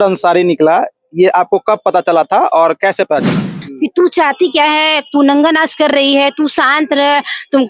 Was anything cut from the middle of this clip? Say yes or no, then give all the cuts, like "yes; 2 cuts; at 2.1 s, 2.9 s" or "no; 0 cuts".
yes; 1 cut; at 3.6 s